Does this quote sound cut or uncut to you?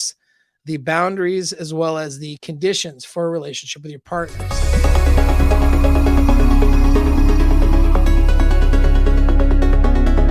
cut